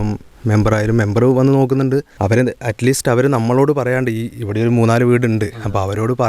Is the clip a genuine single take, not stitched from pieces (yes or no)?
no